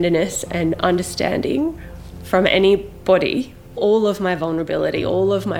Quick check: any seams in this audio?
yes; 1 cut; at 3.8 s

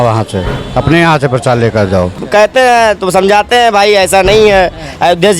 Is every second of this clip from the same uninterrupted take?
no; 1 cut; at 2.2 s

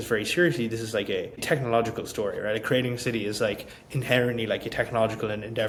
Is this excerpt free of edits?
yes; 0 cuts

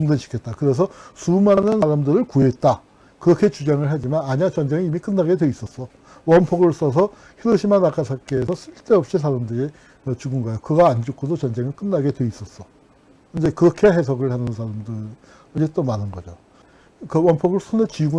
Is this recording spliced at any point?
yes; 1 cut; at 16.8 s

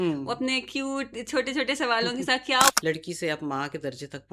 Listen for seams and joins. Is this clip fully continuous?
no; 1 cut; at 2.7 s

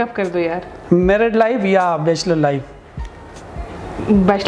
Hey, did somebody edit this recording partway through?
no; 0 cuts

